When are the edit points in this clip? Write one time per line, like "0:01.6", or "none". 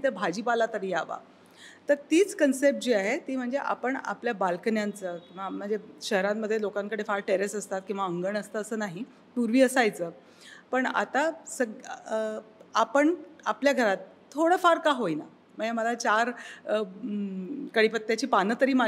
none